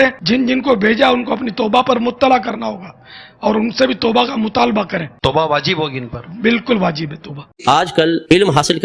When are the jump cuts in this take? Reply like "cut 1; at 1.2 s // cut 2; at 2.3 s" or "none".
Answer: cut 1; at 7.5 s